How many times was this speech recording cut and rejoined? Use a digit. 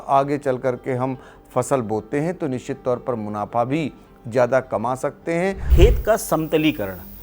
1